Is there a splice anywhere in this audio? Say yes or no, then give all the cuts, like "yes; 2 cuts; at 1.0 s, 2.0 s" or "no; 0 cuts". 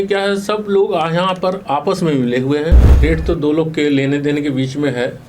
yes; 1 cut; at 2.9 s